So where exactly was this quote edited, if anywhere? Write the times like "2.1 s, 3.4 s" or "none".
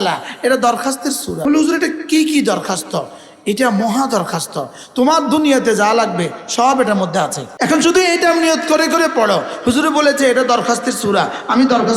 1.3 s, 7.4 s